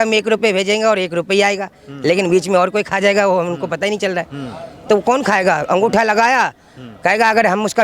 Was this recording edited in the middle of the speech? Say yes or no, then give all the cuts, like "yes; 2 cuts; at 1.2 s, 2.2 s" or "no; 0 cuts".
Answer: no; 0 cuts